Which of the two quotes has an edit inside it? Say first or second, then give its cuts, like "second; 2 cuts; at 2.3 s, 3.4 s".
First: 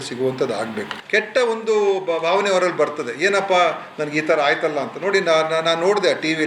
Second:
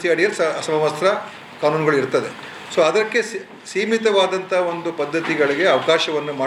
first; 1 cut; at 1.0 s